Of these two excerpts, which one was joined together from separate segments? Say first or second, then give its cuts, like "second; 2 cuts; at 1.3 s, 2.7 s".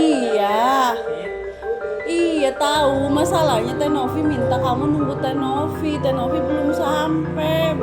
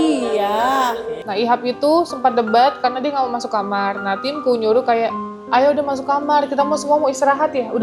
second; 1 cut; at 1.3 s